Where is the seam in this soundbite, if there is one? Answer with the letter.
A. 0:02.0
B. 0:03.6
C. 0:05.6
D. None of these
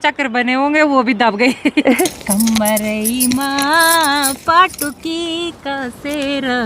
A